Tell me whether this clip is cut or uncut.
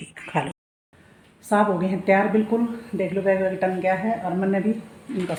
uncut